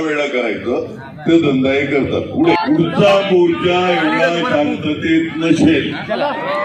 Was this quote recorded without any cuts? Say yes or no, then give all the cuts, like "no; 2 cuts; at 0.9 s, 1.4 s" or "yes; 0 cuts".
no; 1 cut; at 2.6 s